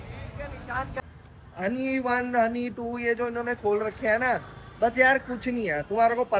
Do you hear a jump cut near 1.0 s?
yes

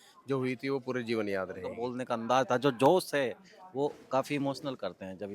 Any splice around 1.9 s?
yes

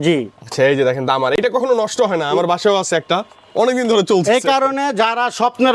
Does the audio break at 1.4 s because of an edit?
no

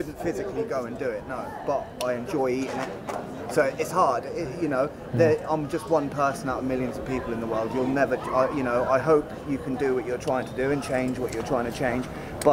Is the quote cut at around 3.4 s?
no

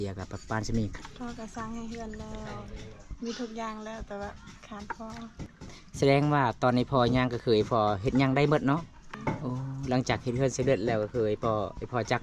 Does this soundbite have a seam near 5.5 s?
yes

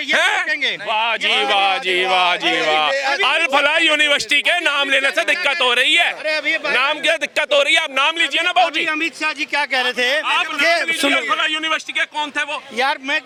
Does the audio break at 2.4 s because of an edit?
no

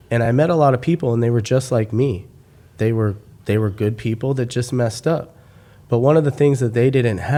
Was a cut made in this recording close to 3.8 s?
no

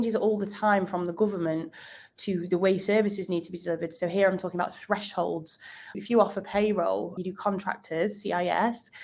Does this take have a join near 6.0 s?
yes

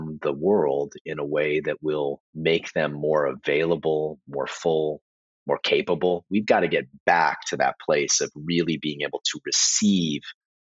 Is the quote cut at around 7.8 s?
no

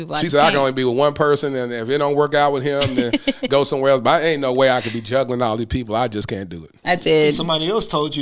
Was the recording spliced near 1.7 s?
no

